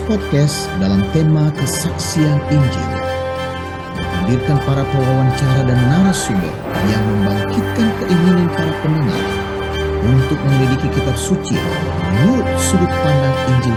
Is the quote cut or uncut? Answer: uncut